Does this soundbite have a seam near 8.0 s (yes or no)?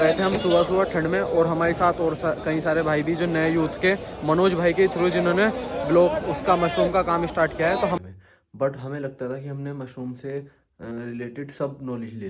yes